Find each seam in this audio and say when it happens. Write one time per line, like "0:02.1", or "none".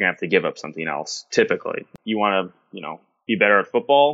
0:01.9